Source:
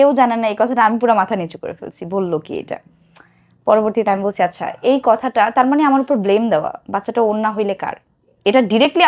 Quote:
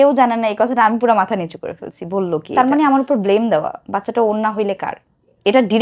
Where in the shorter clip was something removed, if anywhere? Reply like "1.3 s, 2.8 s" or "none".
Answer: 2.5 s